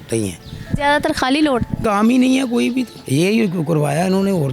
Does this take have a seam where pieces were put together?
yes; 2 cuts; at 1.8 s, 3.0 s

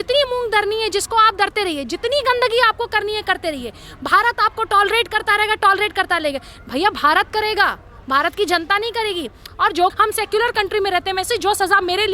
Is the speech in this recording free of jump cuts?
no; 1 cut; at 9.9 s

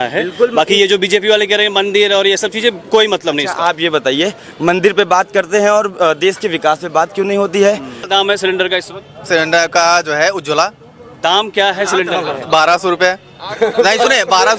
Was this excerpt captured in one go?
no; 1 cut; at 8.1 s

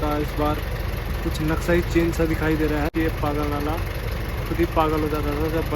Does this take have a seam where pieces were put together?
yes; 1 cut; at 2.9 s

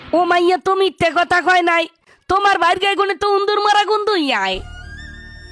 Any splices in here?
no; 0 cuts

